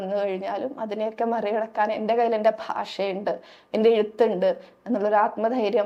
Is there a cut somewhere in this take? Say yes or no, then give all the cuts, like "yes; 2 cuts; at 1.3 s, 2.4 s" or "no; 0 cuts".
no; 0 cuts